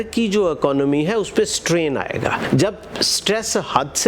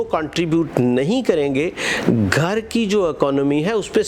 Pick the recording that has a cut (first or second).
first